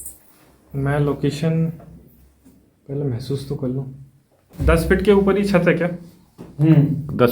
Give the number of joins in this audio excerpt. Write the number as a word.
one